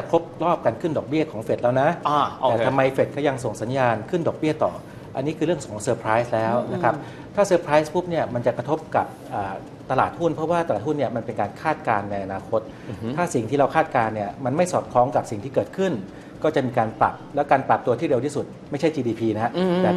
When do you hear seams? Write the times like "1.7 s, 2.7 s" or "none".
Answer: none